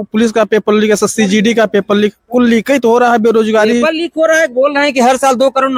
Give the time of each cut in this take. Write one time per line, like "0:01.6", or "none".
none